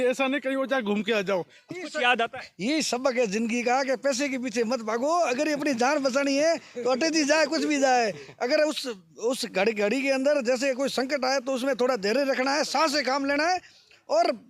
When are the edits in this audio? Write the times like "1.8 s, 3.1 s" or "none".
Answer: 1.8 s